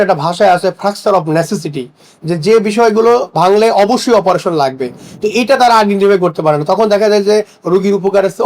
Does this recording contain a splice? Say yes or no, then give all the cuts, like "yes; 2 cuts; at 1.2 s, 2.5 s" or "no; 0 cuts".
no; 0 cuts